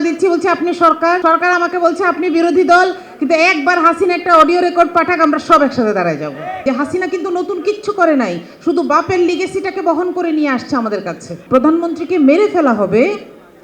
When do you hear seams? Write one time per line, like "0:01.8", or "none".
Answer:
0:01.2
0:06.6
0:11.4

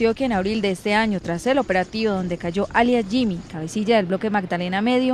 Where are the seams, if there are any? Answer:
0:02.9

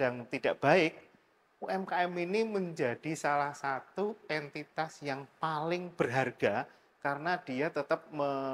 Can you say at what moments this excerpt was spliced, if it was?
none

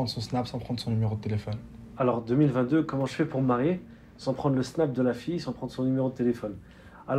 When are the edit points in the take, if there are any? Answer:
none

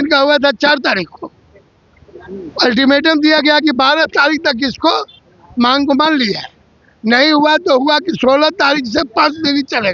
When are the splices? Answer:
none

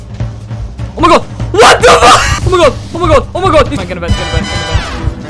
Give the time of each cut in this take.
0:03.8

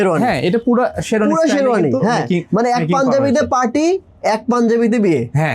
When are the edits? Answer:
none

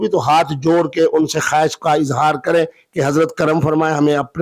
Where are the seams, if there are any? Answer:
none

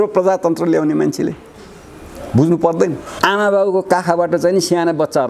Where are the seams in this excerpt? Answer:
0:03.1

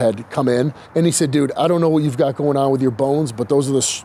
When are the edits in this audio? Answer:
none

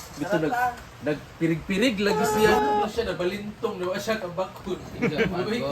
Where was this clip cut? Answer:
0:02.5

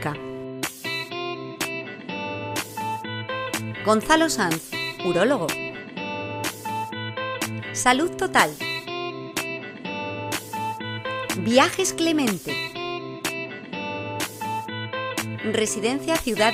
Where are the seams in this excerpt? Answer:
none

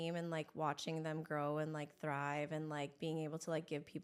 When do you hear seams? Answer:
none

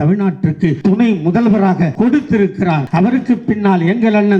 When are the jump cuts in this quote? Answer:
0:00.8
0:01.9
0:02.8

